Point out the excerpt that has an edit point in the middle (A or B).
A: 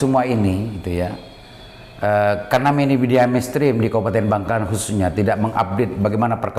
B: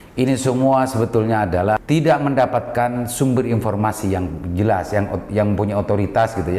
B